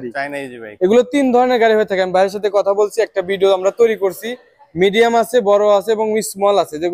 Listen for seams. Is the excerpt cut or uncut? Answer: uncut